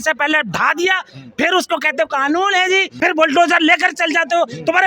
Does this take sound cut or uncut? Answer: cut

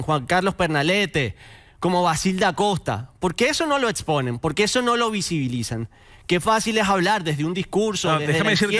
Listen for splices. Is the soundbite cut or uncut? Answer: uncut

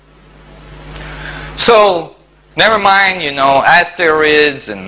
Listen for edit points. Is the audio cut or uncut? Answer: uncut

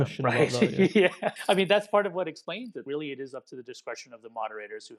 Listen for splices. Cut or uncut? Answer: cut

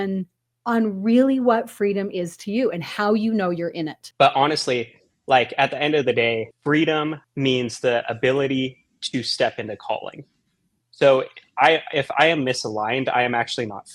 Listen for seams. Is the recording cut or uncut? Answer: cut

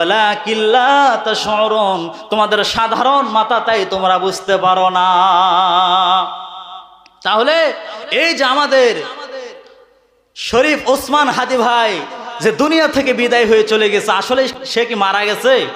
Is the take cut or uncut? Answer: cut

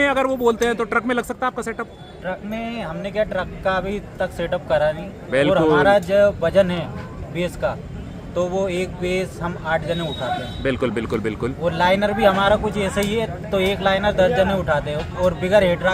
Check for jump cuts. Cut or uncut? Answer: uncut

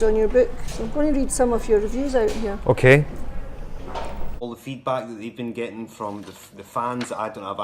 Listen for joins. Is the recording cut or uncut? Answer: cut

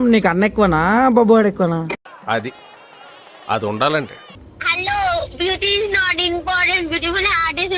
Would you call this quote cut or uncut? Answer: cut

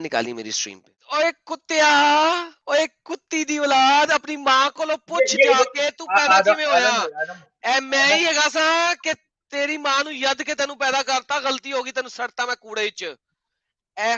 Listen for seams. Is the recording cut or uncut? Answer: cut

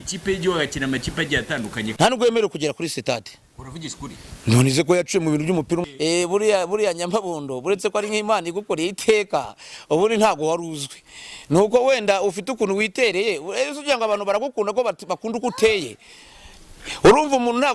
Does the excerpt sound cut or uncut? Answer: cut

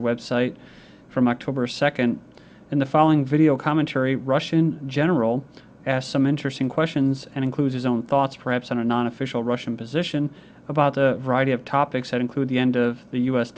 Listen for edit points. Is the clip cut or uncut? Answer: cut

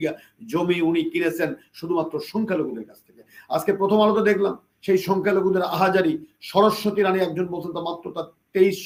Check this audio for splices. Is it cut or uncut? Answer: uncut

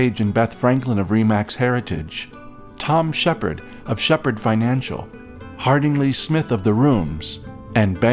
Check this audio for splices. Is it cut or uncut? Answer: uncut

